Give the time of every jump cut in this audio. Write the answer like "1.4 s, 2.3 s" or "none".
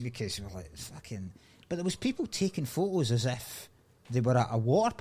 none